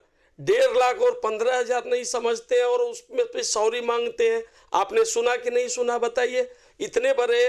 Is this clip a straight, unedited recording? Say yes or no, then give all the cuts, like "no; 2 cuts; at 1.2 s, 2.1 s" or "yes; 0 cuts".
yes; 0 cuts